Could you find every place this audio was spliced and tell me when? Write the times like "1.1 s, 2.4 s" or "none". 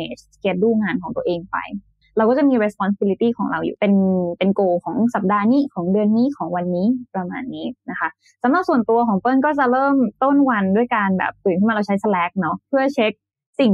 1.9 s, 12.6 s